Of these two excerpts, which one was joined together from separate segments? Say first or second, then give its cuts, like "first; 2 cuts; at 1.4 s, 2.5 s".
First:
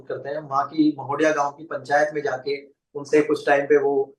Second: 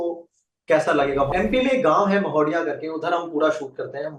second; 1 cut; at 1.3 s